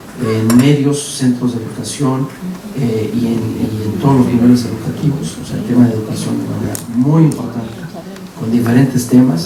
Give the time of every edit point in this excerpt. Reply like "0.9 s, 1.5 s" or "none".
none

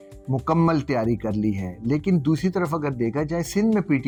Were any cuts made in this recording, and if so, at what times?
none

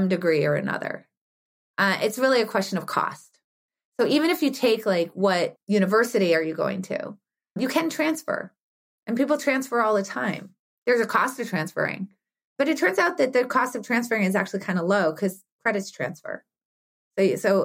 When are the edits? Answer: 5.6 s, 7.6 s, 12.5 s

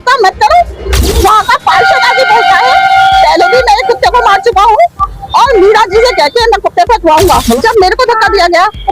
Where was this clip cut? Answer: 1.2 s, 7.6 s

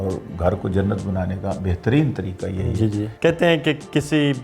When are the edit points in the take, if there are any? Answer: 3.1 s

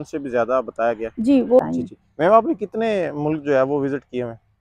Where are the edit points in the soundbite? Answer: 1.6 s

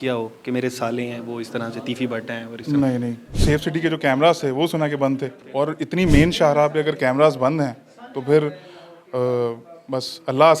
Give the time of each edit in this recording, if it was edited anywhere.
3.3 s, 5.4 s

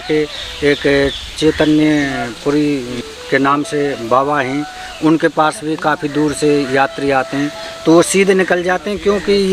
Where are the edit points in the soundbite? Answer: 3.1 s

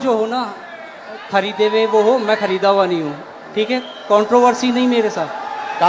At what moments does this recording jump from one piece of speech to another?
none

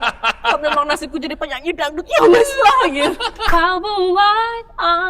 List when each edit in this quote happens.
3.3 s

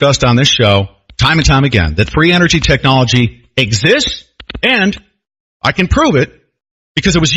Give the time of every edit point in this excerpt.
5.7 s

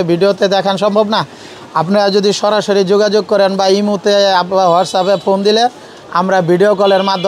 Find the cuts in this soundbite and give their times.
none

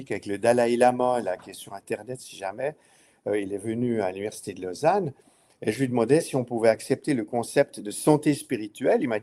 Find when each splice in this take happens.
none

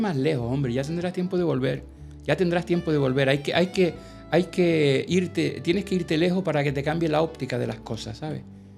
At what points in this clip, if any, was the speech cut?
none

